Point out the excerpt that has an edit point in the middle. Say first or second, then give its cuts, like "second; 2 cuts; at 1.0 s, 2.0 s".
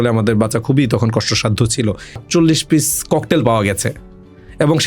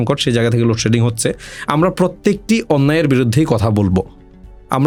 first; 1 cut; at 2.2 s